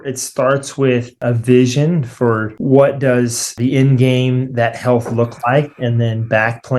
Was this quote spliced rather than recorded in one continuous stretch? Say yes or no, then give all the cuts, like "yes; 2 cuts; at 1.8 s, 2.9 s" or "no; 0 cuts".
yes; 3 cuts; at 1.2 s, 2.5 s, 3.5 s